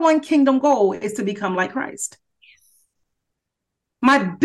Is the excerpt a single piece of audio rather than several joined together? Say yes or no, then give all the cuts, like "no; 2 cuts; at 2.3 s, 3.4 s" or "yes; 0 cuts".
yes; 0 cuts